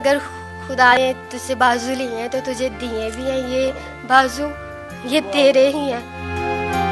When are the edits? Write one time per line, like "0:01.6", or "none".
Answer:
0:00.9